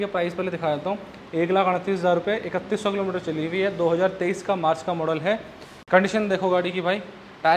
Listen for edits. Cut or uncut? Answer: uncut